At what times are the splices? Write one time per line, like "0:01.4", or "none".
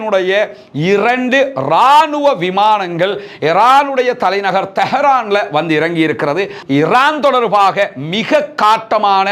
0:06.6